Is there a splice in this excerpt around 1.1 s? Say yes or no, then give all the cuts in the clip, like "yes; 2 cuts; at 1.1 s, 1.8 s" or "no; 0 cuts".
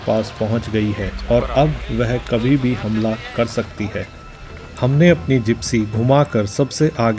yes; 1 cut; at 1.1 s